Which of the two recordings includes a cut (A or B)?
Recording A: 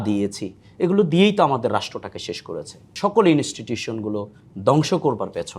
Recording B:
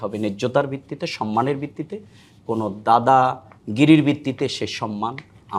A